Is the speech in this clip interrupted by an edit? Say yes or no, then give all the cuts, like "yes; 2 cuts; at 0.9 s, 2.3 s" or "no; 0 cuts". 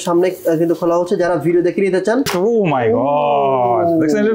yes; 1 cut; at 2.3 s